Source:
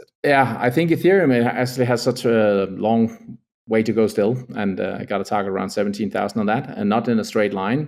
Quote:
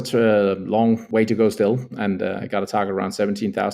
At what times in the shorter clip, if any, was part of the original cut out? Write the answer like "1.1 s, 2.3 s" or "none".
1.0 s